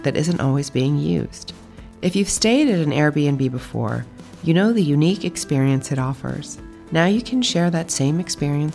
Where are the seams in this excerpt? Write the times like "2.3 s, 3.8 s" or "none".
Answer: none